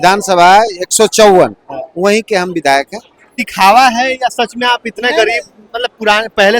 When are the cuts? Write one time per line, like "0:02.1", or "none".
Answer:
0:03.4